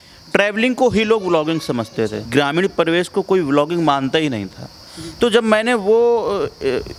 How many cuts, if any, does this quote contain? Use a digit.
1